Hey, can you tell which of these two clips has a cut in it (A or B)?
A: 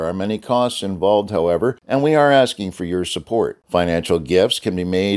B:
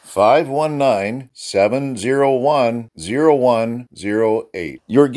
A